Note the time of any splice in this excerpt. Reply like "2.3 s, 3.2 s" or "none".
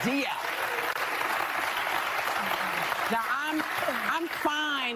0.9 s